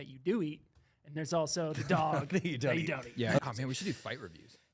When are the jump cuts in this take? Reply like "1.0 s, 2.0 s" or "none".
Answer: 3.4 s